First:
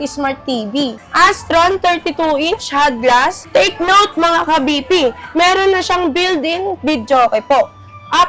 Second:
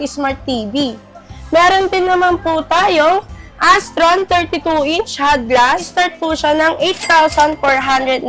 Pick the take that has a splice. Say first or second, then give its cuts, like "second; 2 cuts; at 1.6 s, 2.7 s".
first; 2 cuts; at 1.0 s, 3.4 s